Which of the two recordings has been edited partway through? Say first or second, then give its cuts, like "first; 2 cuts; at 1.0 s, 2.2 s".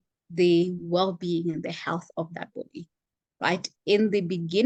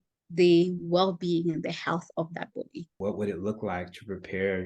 second; 1 cut; at 2.8 s